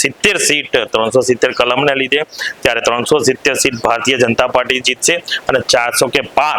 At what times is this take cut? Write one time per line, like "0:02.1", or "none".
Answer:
none